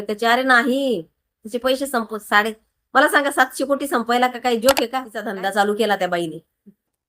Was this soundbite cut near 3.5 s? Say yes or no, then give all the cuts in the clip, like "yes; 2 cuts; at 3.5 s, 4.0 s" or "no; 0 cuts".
no; 1 cut; at 5.2 s